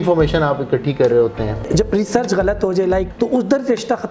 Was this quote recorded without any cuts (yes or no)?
no